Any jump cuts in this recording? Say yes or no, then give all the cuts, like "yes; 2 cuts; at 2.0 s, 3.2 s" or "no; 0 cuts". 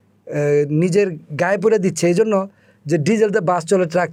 no; 0 cuts